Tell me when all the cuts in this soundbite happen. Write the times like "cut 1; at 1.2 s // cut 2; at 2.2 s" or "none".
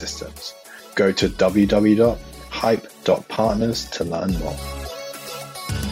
cut 1; at 4.5 s

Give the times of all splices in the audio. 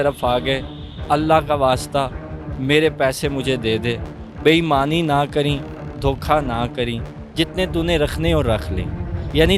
none

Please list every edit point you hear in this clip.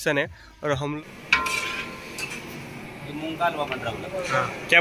cut 1; at 0.9 s

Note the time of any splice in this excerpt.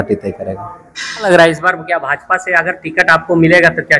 cut 1; at 1.2 s

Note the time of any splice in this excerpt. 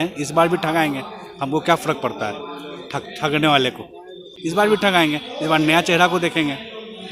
cut 1; at 4.3 s

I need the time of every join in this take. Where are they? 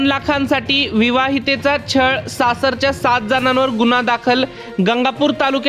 none

